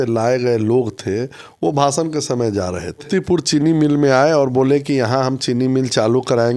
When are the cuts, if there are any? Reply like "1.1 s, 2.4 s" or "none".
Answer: 3.1 s